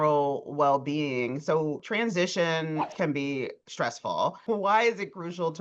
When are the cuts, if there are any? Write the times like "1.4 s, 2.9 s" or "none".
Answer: 1.8 s, 2.9 s, 4.4 s